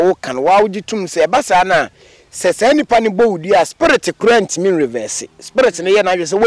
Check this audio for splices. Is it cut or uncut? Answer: uncut